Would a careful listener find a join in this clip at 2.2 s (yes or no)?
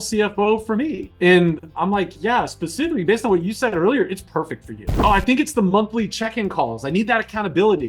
no